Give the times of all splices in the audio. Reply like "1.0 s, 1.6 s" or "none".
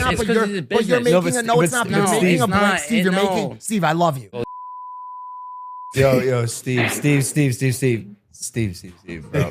4.4 s